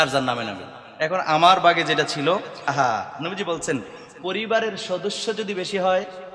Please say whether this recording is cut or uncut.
cut